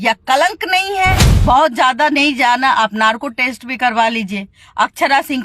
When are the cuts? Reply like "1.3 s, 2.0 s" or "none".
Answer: 1.3 s